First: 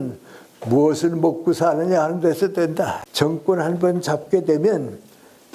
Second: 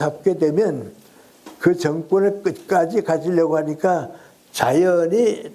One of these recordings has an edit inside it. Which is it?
first; 1 cut; at 3.0 s

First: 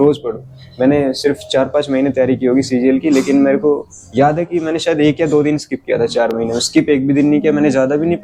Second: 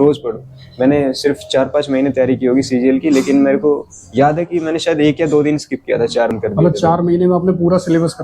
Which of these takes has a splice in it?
second; 1 cut; at 6.3 s

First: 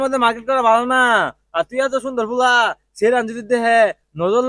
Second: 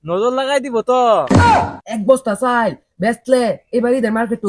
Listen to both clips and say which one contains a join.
second; 1 cut; at 1.4 s

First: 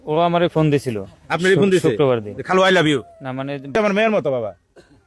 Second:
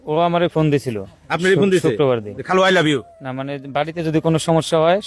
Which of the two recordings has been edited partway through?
first; 1 cut; at 3.8 s

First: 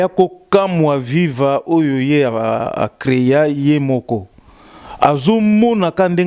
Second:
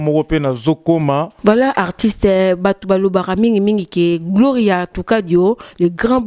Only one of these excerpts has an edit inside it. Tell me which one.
second; 1 cut; at 1.3 s

